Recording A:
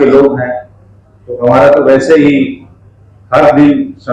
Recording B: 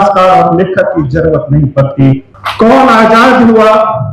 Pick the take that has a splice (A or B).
B